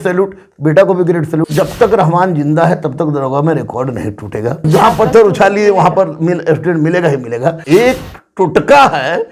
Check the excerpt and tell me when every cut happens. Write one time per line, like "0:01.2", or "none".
0:01.5
0:04.6
0:07.6